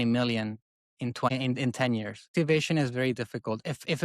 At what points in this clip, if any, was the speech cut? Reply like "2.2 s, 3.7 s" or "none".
1.3 s, 2.3 s